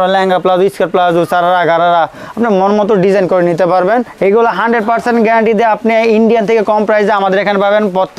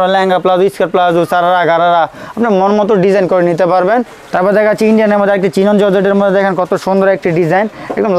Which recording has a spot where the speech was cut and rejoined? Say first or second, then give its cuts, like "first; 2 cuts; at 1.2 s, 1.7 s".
first; 1 cut; at 4.1 s